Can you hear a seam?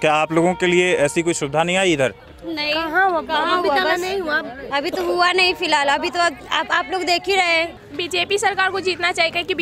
yes; 1 cut; at 7.8 s

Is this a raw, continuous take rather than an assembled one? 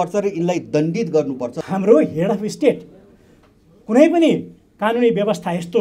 no; 1 cut; at 1.6 s

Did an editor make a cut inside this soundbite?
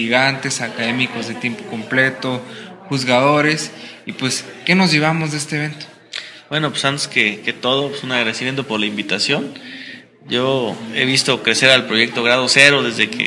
yes; 1 cut; at 9.9 s

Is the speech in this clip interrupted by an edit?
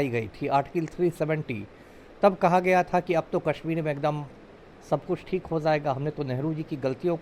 no; 0 cuts

